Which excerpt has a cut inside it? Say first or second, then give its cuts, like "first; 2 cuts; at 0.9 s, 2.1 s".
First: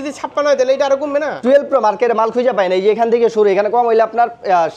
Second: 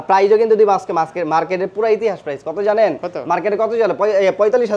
first; 1 cut; at 1.3 s